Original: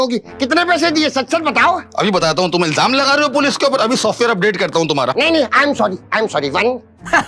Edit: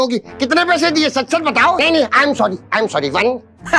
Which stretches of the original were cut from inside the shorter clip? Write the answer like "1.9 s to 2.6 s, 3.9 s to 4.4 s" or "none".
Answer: 1.8 s to 5.2 s

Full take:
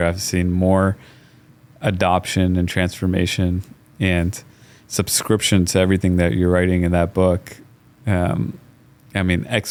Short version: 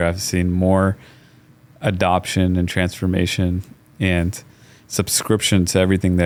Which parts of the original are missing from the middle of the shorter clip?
none

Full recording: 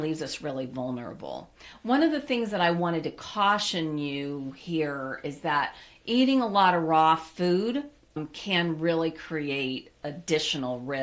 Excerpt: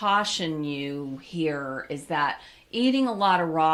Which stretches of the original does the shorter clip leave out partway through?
none

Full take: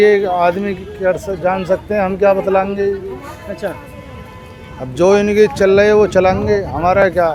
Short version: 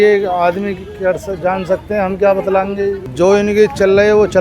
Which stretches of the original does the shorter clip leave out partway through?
3.1 s to 4.9 s

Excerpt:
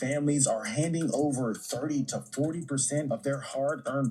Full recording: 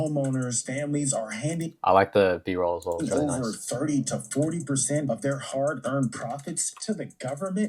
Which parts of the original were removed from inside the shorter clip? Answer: 1.7 s to 3.0 s

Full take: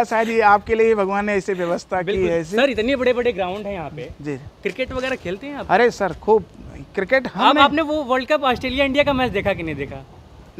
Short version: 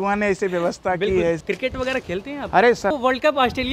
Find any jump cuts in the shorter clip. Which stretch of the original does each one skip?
2.5 s to 4.6 s, 6.1 s to 8.0 s

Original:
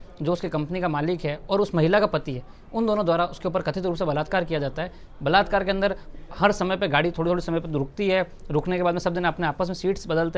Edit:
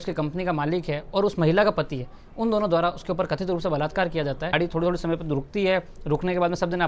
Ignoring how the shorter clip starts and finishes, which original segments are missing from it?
4.9 s to 7.0 s

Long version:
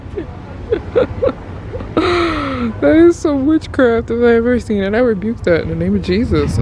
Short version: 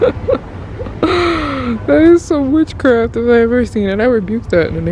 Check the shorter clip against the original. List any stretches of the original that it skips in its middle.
none

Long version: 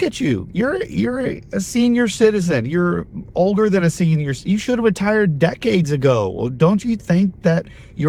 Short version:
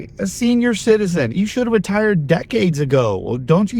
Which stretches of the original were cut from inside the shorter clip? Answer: 2.6 s to 4.4 s

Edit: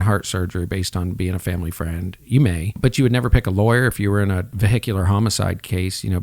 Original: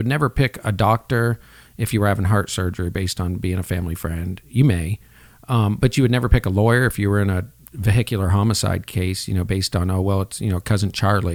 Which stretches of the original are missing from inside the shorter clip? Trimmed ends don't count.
5.0 s to 5.8 s, 7.5 s to 7.7 s

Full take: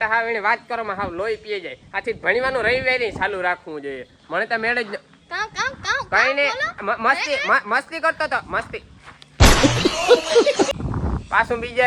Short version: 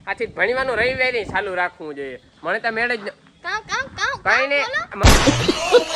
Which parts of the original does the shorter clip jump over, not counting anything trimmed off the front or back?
6.9 s to 9.4 s

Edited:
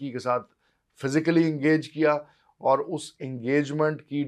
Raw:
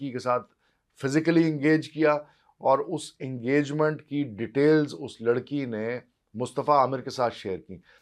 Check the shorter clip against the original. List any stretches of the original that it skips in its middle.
none

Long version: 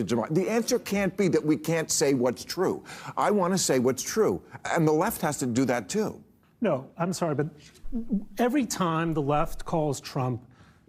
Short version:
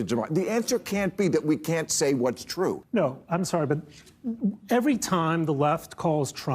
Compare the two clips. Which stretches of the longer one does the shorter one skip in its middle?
2.8 s to 6.5 s

